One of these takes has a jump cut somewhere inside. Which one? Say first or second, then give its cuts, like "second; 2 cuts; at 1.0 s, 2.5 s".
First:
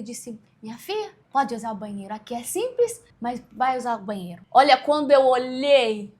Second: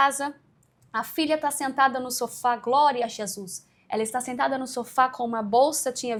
first; 3 cuts; at 1.2 s, 3.1 s, 4.3 s